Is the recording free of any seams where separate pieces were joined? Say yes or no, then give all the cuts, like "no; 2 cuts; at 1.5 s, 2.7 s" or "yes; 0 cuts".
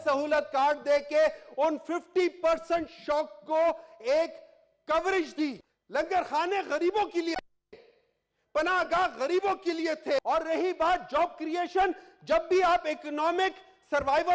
no; 2 cuts; at 5.7 s, 10.2 s